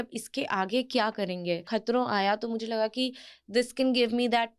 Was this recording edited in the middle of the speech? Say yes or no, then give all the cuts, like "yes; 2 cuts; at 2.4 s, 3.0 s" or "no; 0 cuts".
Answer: yes; 1 cut; at 1.6 s